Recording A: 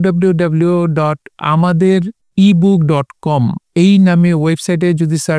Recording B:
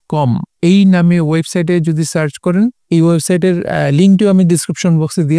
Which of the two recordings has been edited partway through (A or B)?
A